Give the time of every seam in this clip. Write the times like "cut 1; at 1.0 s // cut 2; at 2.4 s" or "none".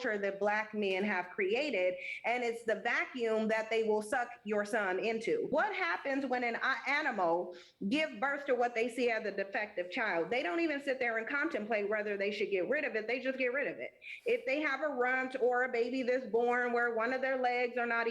cut 1; at 5.5 s